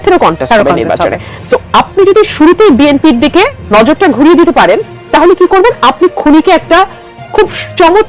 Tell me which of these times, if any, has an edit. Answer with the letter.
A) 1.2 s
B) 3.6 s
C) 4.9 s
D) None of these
B